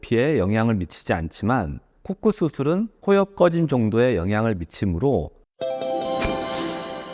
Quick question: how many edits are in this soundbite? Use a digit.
1